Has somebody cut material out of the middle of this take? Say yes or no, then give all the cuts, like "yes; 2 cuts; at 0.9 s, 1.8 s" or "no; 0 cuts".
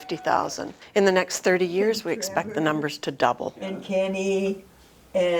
no; 0 cuts